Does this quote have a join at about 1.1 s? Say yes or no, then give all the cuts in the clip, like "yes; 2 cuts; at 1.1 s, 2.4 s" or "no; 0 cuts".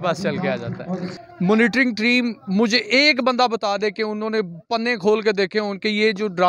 yes; 1 cut; at 1.1 s